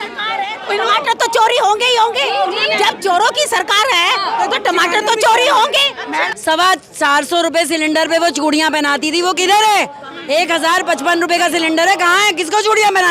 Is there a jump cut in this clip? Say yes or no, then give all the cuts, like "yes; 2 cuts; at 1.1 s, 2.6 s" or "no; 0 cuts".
yes; 1 cut; at 6.3 s